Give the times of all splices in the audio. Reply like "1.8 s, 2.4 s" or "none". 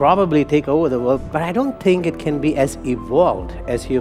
1.2 s